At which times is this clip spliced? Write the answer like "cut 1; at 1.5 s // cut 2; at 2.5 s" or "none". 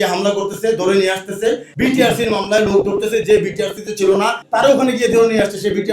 cut 1; at 4.4 s